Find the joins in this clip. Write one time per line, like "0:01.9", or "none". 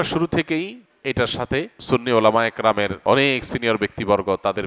0:01.8
0:03.0